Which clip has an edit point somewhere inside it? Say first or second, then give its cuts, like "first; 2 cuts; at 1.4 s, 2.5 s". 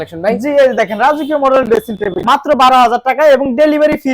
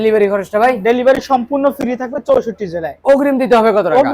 first; 1 cut; at 2.2 s